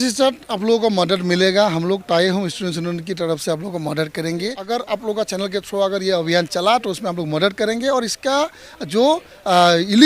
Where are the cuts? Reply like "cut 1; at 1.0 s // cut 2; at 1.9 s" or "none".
cut 1; at 4.6 s